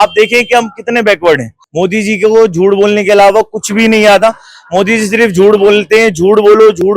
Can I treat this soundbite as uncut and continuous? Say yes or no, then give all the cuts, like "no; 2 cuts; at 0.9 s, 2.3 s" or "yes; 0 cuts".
no; 1 cut; at 1.6 s